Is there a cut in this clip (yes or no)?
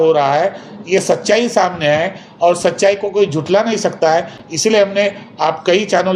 no